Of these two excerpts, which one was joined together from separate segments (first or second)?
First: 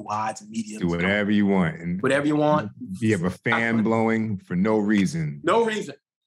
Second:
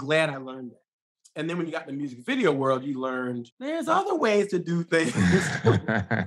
second